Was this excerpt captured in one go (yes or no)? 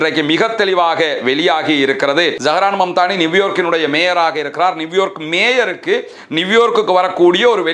no